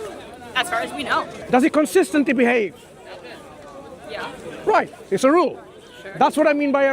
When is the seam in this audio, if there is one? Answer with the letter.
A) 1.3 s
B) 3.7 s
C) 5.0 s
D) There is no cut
A